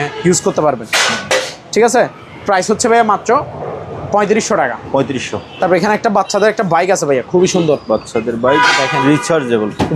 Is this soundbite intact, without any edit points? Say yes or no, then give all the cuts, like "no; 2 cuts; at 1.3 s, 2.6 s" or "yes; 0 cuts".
yes; 0 cuts